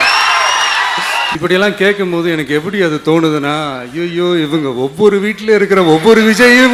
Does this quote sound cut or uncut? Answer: cut